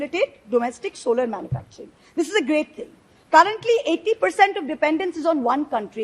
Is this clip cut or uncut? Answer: uncut